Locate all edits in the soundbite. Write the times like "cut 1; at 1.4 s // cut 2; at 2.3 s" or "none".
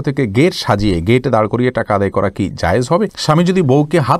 cut 1; at 3.2 s